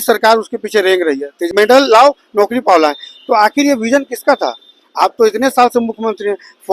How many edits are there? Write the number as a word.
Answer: one